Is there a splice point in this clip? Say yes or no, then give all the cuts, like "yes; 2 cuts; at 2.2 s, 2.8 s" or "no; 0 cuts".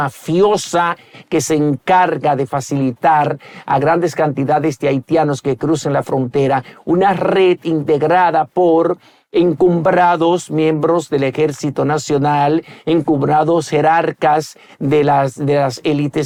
no; 0 cuts